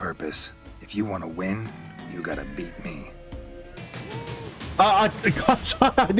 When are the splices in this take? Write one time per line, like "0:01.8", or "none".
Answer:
0:03.8